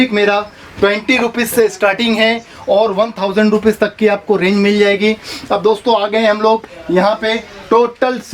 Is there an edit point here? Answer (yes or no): no